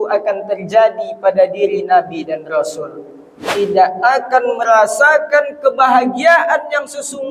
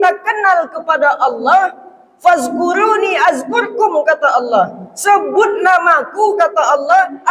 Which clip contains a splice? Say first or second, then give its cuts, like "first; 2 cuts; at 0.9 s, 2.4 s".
first; 1 cut; at 3.4 s